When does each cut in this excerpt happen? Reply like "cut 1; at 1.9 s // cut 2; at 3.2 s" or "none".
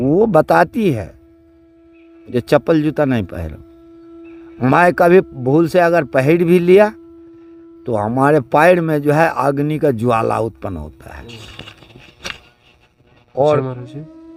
none